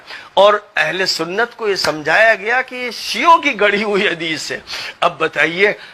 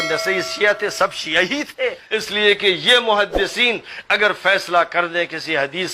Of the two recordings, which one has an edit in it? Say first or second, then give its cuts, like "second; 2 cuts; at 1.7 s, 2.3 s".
second; 1 cut; at 2.1 s